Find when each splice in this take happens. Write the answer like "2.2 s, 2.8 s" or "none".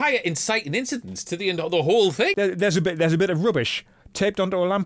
2.3 s